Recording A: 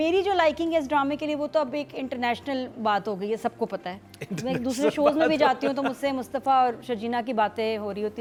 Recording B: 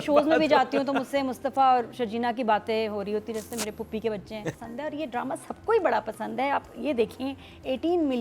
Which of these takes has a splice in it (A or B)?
B